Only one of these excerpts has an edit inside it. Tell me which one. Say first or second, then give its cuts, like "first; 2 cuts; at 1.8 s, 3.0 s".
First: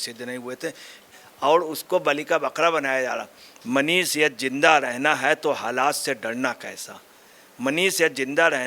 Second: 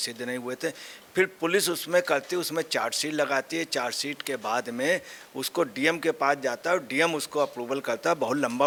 first; 2 cuts; at 1.0 s, 3.5 s